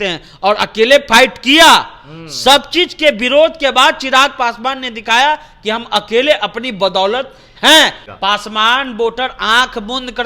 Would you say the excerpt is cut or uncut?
cut